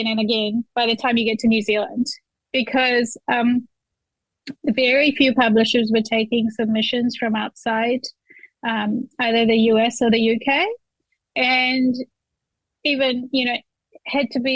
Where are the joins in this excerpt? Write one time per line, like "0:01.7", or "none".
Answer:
none